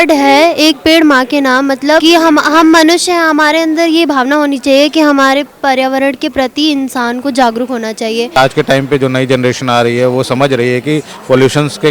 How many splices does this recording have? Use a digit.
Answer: 2